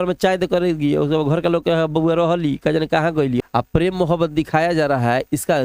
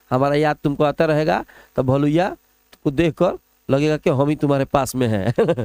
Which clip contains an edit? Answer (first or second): first